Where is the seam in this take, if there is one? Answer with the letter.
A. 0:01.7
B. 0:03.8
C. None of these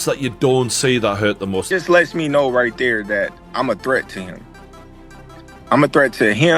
A